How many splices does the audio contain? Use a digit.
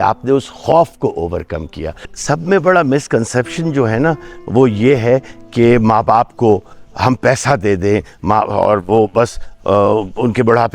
1